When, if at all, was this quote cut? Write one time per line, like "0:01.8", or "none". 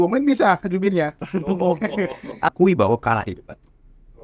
0:02.5